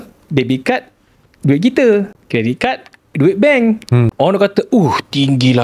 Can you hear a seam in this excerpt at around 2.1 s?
yes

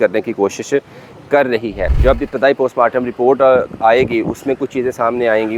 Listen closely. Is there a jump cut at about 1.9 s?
yes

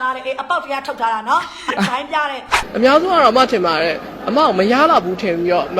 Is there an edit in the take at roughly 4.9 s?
no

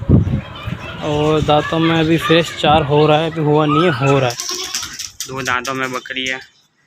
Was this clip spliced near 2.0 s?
no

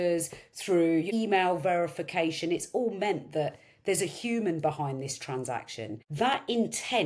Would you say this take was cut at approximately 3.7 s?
no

